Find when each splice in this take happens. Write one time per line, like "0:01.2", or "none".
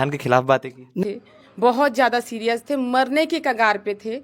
0:01.0